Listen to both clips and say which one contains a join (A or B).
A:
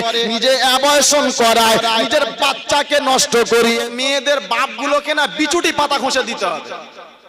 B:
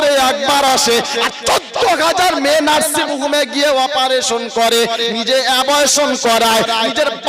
A